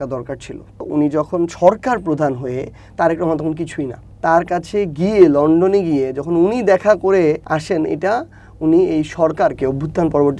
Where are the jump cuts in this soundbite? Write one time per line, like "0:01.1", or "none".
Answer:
0:00.8
0:04.0
0:07.4